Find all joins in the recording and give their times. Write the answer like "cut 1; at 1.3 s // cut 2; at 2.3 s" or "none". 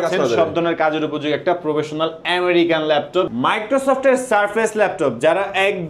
cut 1; at 3.3 s